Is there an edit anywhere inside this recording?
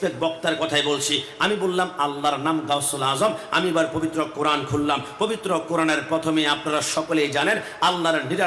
no; 0 cuts

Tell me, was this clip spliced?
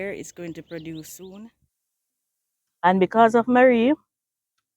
yes; 1 cut; at 1.6 s

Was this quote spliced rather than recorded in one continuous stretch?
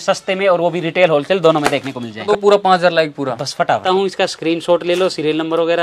yes; 2 cuts; at 2.2 s, 3.8 s

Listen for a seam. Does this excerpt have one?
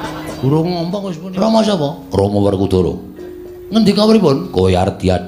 yes; 1 cut; at 1.0 s

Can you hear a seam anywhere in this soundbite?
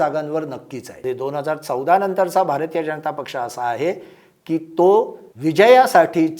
yes; 2 cuts; at 0.9 s, 5.2 s

